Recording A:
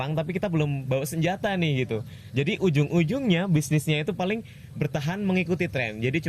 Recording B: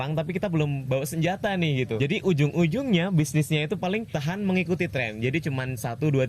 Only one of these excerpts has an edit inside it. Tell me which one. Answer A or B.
B